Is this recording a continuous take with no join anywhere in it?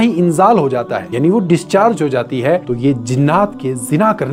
yes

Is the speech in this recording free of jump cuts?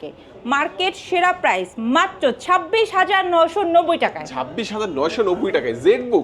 yes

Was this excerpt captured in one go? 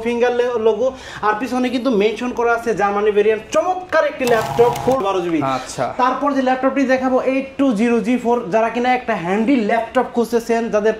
no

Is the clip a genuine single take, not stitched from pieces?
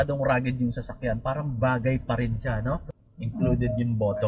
no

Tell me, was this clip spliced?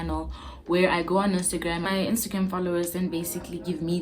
yes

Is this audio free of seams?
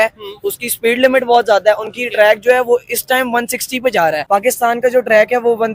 no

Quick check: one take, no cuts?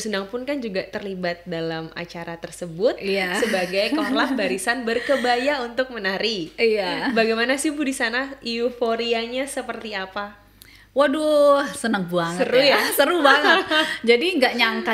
yes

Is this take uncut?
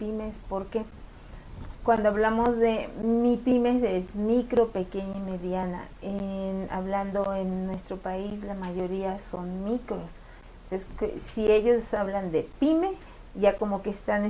no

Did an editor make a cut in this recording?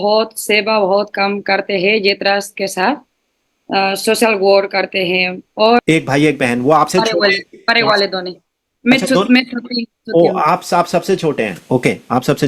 yes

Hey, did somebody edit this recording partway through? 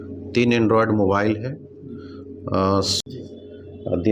yes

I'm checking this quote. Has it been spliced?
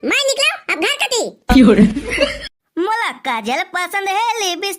yes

